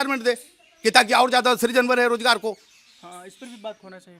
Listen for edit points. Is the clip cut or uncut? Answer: uncut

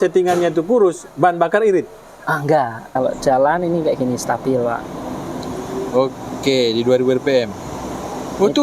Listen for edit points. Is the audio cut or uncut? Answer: cut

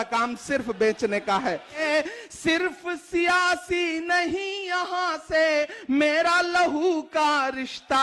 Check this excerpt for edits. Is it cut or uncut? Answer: cut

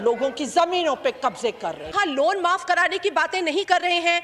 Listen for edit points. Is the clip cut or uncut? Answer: cut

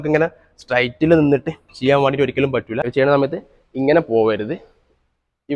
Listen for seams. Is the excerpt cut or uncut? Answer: cut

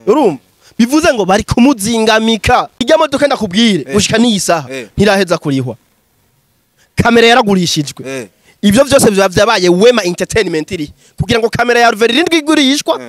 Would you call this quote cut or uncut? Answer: cut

